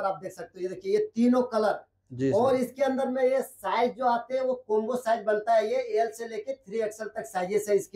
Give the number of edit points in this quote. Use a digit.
0